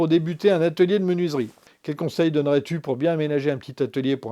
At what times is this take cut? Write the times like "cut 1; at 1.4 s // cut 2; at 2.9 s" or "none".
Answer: cut 1; at 1.5 s